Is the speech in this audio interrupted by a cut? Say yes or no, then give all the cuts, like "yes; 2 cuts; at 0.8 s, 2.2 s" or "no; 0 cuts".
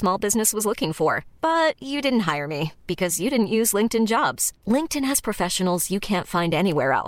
no; 0 cuts